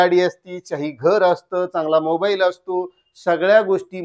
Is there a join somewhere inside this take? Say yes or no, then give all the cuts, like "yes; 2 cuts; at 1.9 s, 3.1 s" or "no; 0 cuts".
no; 0 cuts